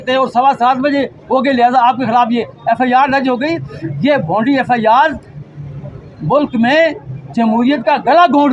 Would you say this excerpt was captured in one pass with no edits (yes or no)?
yes